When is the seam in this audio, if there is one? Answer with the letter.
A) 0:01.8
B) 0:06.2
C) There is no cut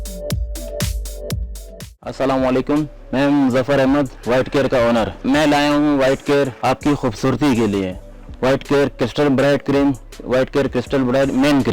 A